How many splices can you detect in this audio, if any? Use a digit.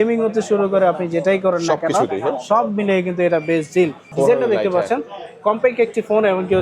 1